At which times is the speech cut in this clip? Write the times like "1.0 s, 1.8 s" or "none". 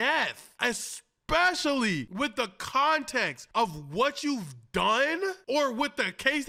none